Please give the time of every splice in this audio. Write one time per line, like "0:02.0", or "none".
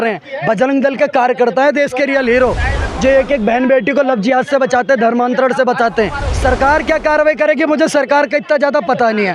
0:06.2